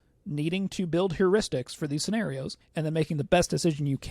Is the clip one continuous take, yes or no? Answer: no